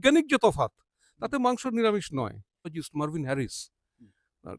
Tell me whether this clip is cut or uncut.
cut